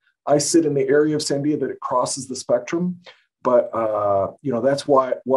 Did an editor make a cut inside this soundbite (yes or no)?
no